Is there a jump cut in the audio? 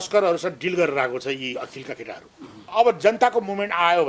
yes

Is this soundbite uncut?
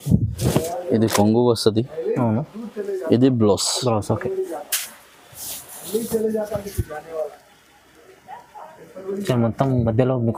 yes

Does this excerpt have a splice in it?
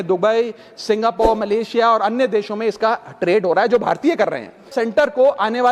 yes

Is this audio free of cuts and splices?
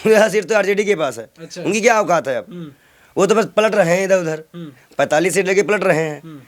yes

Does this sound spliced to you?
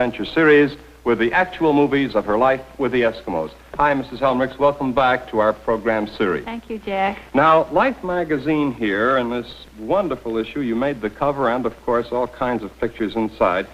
yes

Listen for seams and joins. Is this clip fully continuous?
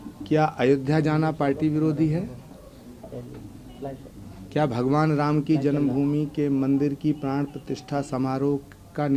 yes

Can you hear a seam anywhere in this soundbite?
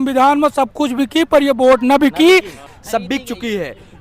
yes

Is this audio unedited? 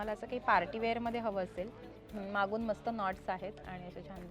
no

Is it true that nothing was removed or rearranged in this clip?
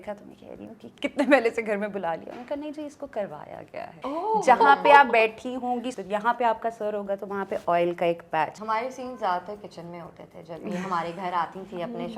no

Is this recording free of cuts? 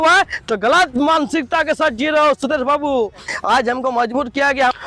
no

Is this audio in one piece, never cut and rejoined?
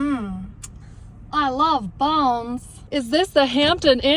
no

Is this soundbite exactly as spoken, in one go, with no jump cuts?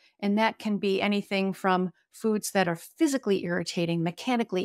yes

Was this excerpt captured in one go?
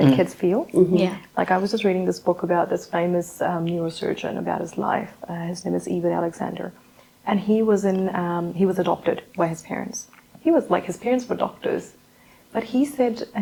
yes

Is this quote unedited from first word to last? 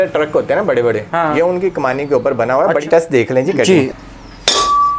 no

